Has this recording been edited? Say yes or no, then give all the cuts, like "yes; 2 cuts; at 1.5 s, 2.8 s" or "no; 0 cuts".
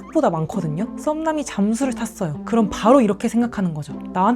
yes; 2 cuts; at 0.9 s, 2.4 s